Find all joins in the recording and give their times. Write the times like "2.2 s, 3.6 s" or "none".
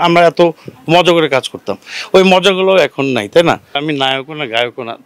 3.8 s